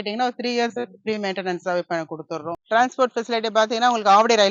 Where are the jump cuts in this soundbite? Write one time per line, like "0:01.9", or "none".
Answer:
0:02.6